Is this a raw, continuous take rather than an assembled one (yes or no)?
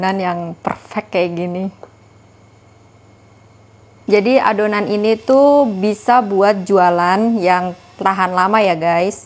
no